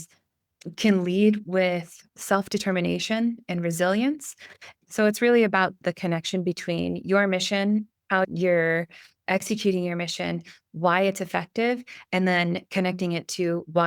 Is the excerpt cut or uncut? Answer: cut